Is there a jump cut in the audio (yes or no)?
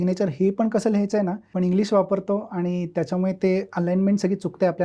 yes